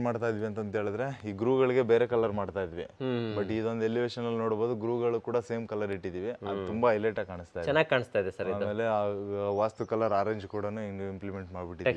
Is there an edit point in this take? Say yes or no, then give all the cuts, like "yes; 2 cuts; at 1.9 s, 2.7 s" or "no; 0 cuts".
no; 0 cuts